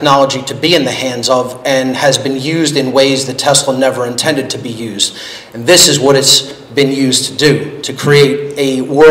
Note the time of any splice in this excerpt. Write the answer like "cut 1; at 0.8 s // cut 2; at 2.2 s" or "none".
none